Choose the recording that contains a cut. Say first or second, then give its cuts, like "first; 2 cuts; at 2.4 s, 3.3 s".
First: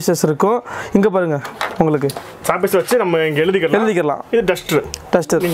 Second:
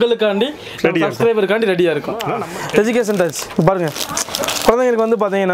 second; 1 cut; at 2.3 s